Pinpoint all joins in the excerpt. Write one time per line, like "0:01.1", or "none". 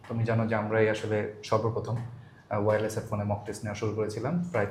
none